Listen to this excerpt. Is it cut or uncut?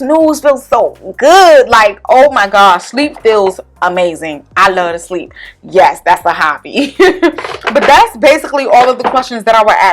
uncut